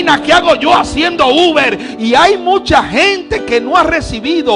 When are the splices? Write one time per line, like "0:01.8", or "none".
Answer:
0:01.9